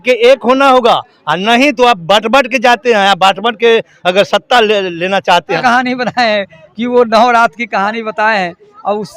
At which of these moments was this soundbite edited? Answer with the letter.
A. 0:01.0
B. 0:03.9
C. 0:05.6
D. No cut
C